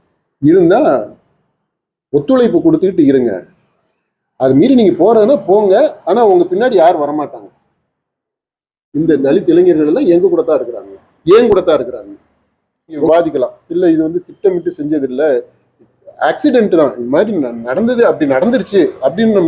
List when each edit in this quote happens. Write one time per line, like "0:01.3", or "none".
0:13.1